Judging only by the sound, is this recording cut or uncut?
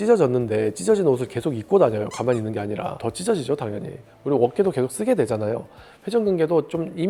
uncut